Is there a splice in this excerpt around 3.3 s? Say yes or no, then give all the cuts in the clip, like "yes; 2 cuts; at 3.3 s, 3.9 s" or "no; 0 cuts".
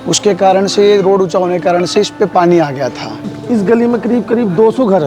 yes; 1 cut; at 3.3 s